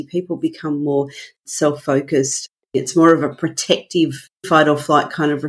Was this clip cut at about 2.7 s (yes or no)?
yes